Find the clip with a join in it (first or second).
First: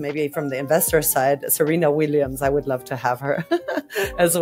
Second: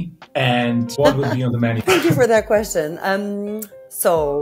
second